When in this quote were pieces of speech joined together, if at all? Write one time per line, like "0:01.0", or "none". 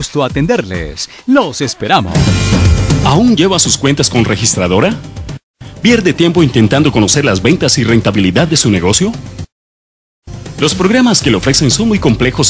0:02.0

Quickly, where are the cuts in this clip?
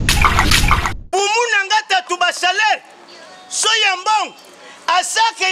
0:00.9

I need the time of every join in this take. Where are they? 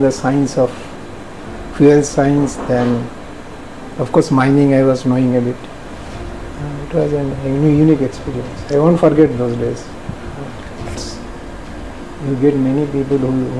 0:11.0

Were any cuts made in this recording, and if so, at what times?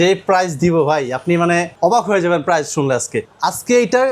0:01.7
0:03.2

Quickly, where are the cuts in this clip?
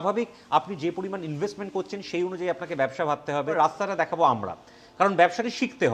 0:03.5

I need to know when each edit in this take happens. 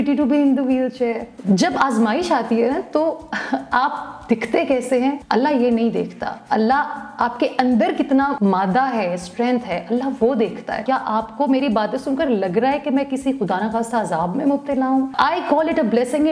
0:01.3
0:05.2
0:08.3
0:10.8
0:15.1

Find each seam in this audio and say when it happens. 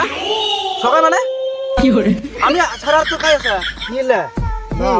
0:03.7

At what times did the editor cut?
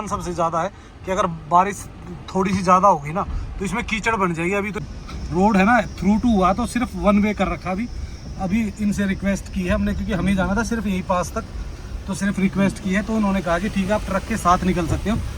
0:04.7

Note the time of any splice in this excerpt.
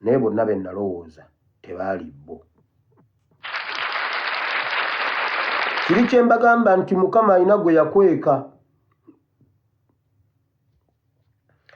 0:03.3
0:05.9

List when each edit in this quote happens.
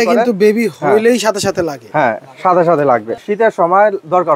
0:03.3

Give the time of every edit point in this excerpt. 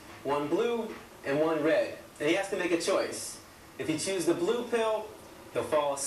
0:02.9

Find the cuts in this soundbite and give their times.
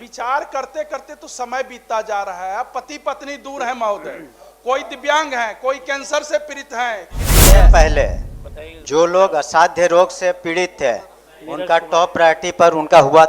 0:07.5

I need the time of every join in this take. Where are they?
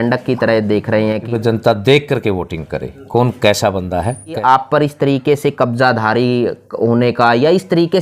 0:01.2
0:04.4

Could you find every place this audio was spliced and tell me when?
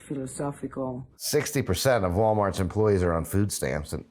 0:01.1

